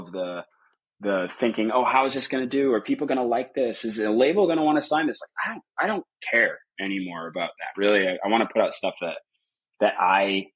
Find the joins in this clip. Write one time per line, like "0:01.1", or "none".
none